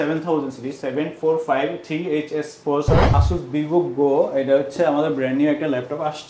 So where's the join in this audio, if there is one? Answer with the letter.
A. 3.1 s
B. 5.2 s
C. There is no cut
A